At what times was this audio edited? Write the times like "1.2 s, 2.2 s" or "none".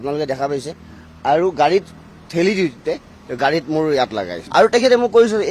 4.4 s